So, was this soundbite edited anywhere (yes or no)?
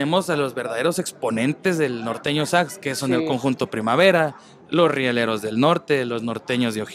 no